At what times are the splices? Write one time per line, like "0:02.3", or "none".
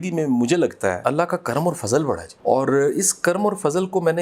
0:01.0
0:02.3